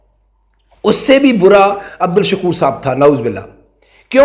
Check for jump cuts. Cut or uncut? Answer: cut